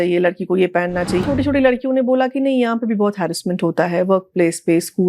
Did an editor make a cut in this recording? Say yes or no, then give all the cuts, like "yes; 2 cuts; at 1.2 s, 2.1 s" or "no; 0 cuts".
yes; 1 cut; at 1.2 s